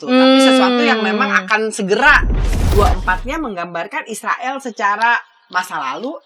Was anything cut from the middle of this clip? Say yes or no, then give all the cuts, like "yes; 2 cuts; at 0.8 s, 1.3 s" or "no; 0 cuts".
yes; 1 cut; at 2.4 s